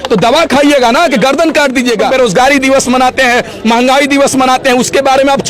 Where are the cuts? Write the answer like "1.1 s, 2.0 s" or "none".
2.1 s